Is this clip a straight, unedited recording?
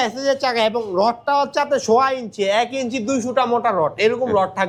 yes; 0 cuts

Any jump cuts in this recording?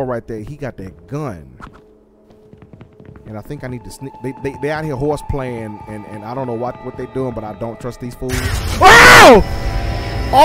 no; 0 cuts

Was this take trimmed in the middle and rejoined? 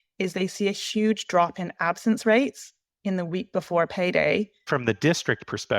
yes; 1 cut; at 4.7 s

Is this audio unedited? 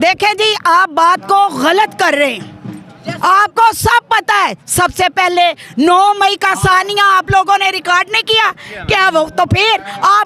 yes; 0 cuts

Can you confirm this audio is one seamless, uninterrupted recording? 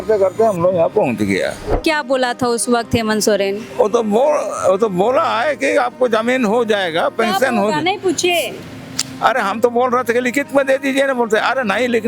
no; 1 cut; at 1.7 s

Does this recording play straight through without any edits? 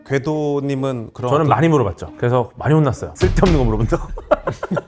yes; 0 cuts

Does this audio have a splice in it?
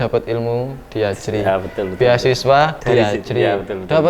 yes; 1 cut; at 2.8 s

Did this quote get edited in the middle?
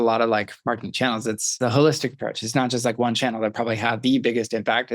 yes; 1 cut; at 1.5 s

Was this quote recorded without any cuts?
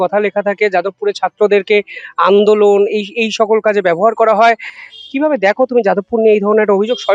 yes; 0 cuts

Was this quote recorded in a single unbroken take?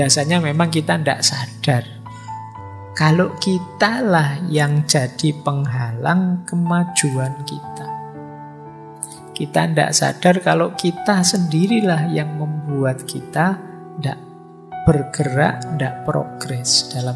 no; 2 cuts; at 7.3 s, 9.4 s

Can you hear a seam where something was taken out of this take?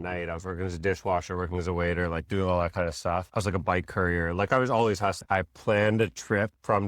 yes; 1 cut; at 5.2 s

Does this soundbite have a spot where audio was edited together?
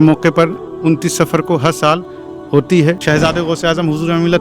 yes; 1 cut; at 3.0 s

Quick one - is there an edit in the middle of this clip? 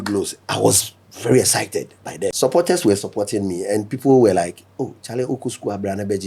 yes; 1 cut; at 2.3 s

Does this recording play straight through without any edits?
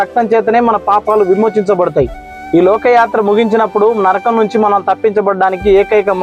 yes; 0 cuts

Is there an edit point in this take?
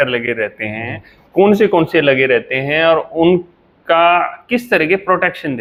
no; 0 cuts

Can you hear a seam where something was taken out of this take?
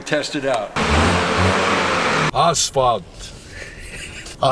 yes; 2 cuts; at 0.8 s, 2.3 s

